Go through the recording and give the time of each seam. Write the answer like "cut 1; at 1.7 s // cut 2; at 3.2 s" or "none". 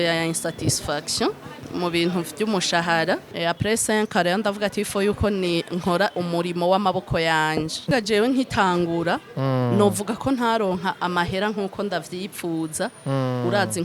cut 1; at 1.7 s // cut 2; at 3.3 s // cut 3; at 7.9 s